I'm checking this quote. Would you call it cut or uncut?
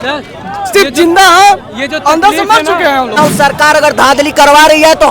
cut